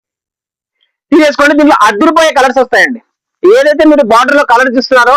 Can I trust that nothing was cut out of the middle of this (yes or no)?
yes